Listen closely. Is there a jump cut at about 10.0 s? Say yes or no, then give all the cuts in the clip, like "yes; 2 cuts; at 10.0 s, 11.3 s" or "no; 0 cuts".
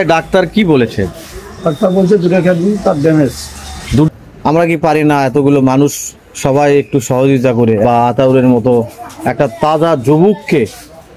no; 2 cuts; at 4.1 s, 7.8 s